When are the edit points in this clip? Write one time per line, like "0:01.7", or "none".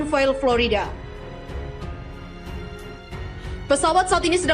0:01.5
0:03.7

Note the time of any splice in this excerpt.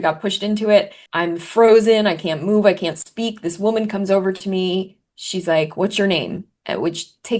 0:01.0

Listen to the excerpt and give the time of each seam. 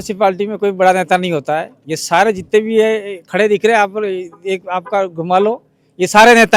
none

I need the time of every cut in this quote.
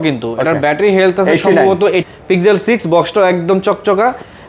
0:02.1

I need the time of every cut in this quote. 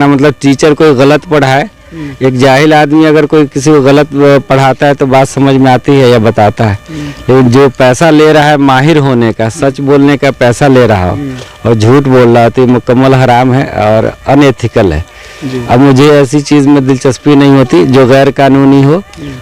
none

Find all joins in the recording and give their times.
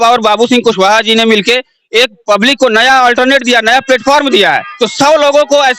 0:04.7

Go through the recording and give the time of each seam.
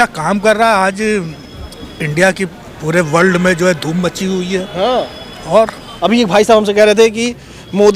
0:05.9

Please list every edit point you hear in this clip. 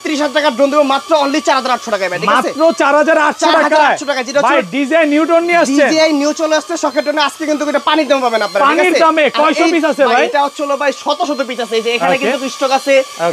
none

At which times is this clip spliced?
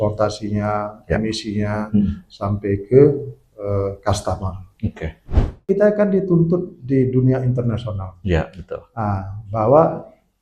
0:05.6

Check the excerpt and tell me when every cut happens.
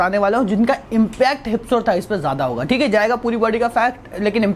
none

